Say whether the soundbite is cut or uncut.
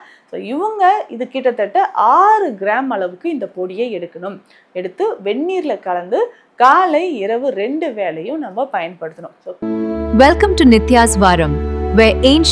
cut